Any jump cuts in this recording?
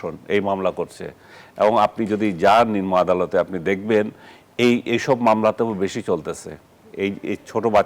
no; 0 cuts

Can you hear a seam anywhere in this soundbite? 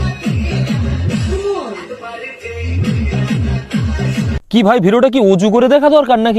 no; 0 cuts

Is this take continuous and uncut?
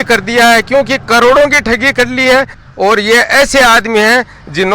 no; 1 cut; at 2.6 s

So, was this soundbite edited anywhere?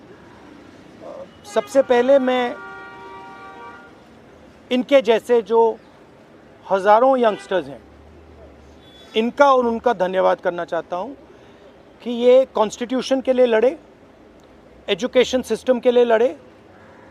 no; 0 cuts

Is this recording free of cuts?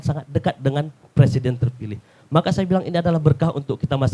yes; 0 cuts

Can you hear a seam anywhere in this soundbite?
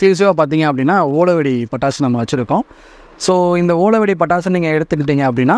no; 0 cuts

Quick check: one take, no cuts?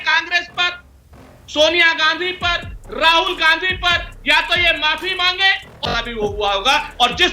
no; 1 cut; at 5.8 s

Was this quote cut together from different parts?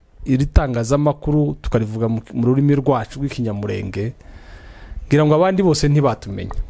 no; 0 cuts

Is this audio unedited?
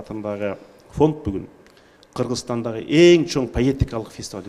yes; 0 cuts

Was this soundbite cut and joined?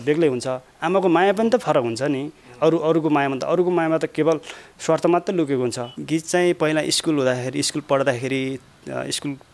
yes; 1 cut; at 5.9 s

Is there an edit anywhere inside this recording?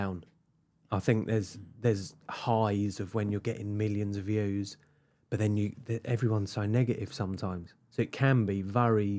no; 0 cuts

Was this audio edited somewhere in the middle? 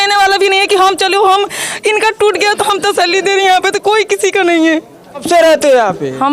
yes; 1 cut; at 5.2 s

